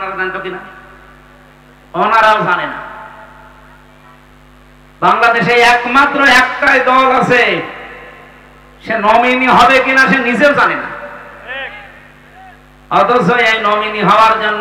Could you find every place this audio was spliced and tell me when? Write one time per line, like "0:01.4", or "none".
none